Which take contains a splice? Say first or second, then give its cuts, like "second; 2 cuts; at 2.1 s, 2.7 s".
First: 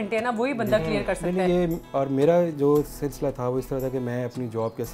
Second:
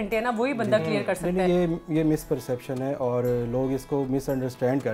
first; 1 cut; at 1.8 s